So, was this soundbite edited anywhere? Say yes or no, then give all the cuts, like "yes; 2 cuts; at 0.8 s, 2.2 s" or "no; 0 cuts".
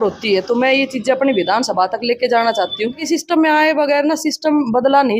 yes; 1 cut; at 3.0 s